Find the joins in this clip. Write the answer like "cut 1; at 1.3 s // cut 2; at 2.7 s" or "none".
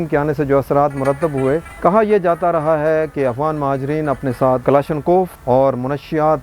cut 1; at 1.7 s // cut 2; at 4.6 s // cut 3; at 5.4 s